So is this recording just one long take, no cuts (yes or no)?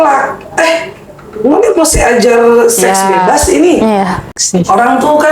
no